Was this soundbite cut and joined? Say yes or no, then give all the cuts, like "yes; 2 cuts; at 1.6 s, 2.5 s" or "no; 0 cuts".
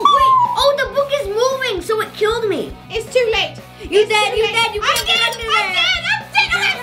yes; 1 cut; at 2.7 s